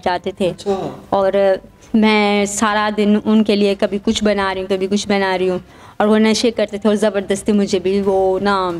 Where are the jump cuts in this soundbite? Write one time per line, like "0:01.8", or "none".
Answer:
none